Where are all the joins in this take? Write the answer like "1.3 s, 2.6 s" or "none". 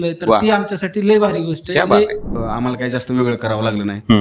2.4 s